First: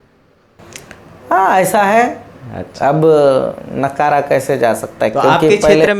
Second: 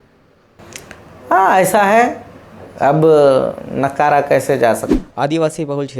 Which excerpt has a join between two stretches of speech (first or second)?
second